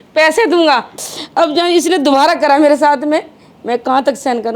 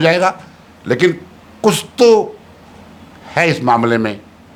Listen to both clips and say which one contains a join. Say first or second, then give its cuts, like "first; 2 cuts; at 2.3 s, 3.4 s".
first; 1 cut; at 0.9 s